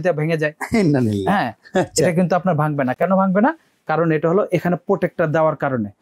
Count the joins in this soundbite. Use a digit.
0